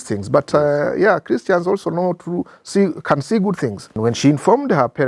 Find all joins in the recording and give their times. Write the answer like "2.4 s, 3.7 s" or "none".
4.0 s